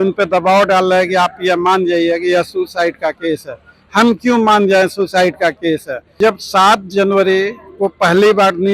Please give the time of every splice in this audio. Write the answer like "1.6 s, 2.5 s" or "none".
6.2 s

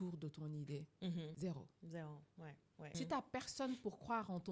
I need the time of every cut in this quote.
1.3 s, 2.9 s

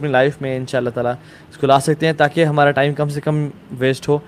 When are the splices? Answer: none

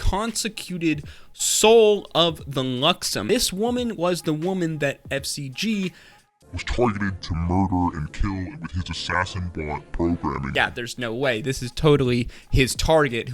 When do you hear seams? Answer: 3.2 s, 10.5 s

